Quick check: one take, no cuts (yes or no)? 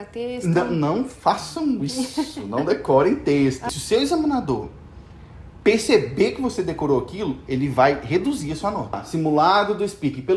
no